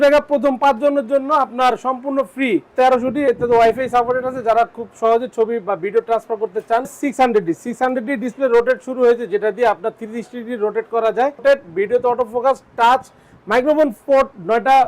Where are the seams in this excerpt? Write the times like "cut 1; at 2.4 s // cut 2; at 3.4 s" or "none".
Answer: cut 1; at 2.7 s // cut 2; at 7.0 s // cut 3; at 11.4 s